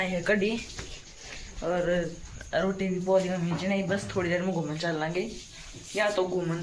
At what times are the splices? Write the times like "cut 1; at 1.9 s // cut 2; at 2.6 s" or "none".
none